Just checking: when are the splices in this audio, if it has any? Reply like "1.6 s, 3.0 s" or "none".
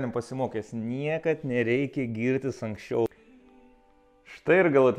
3.1 s